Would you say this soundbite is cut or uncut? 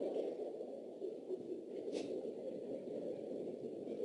uncut